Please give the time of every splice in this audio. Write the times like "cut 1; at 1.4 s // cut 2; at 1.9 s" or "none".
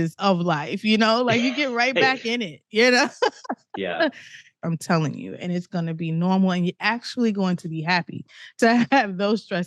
cut 1; at 4.5 s